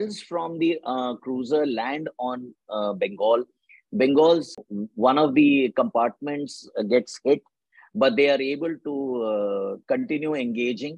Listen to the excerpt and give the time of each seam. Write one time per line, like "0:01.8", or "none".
0:04.5

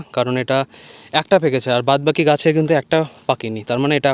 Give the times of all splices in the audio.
none

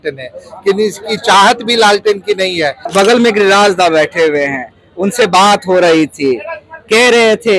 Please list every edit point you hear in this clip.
0:02.9

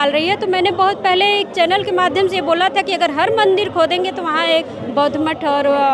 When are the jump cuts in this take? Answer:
none

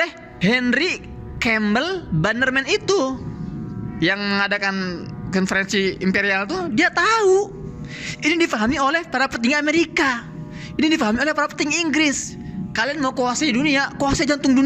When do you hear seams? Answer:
none

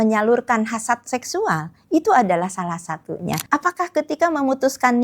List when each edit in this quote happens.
0:03.4

